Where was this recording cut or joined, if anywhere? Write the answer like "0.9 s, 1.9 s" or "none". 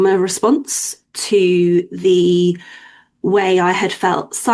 none